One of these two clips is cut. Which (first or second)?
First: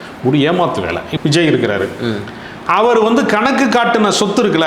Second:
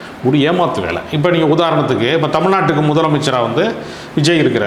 first